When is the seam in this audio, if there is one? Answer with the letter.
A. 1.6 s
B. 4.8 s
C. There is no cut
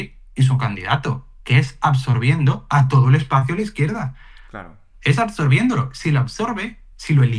C